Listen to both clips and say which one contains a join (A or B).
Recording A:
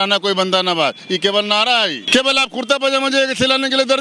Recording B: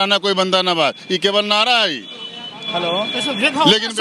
A